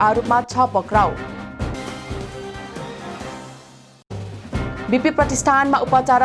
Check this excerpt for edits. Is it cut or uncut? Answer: cut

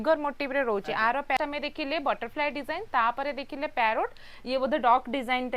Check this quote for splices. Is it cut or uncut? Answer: cut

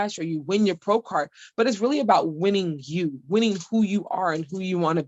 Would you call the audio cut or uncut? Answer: uncut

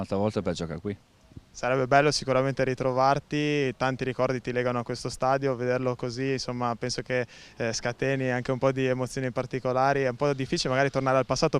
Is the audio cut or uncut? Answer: cut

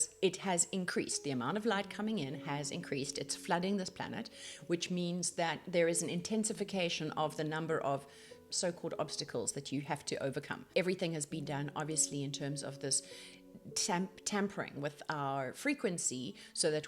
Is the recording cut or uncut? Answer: cut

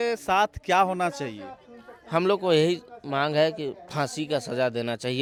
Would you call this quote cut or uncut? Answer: uncut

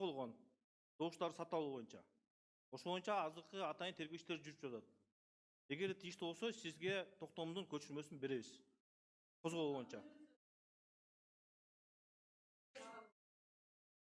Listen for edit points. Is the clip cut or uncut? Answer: uncut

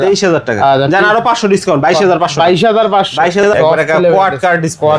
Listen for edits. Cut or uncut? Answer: cut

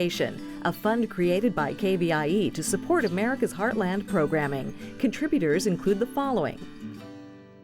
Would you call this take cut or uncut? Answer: cut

